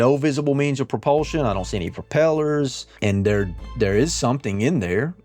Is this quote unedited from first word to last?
no; 1 cut; at 2.8 s

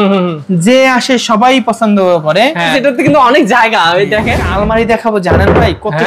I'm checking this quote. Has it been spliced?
yes; 2 cuts; at 2.7 s, 4.4 s

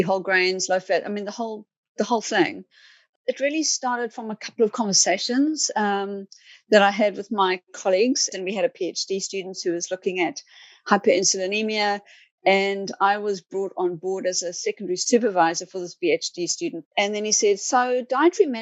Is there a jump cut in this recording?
yes; 3 cuts; at 3.0 s, 8.3 s, 16.8 s

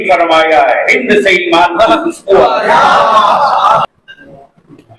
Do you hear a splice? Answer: no; 0 cuts

